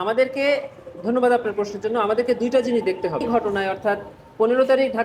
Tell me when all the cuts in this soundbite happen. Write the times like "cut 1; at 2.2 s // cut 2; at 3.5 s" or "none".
cut 1; at 3.4 s